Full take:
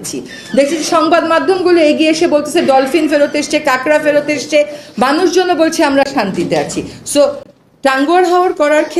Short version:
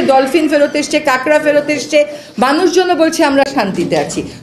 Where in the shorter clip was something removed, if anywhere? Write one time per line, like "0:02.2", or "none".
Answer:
none